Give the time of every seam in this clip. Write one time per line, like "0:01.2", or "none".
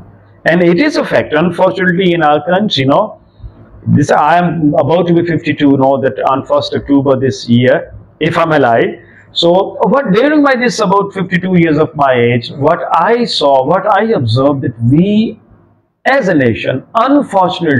none